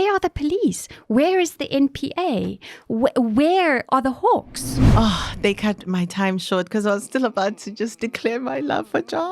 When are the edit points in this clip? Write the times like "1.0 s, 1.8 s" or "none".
4.9 s